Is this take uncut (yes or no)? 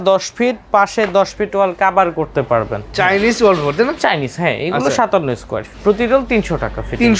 no